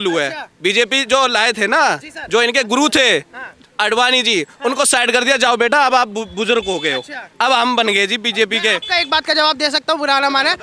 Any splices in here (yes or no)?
no